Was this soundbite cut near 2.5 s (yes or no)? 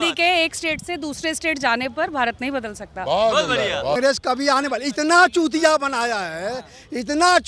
no